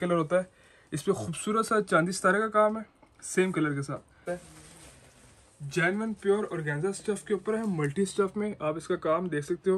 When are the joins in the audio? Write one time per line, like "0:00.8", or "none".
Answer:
0:04.2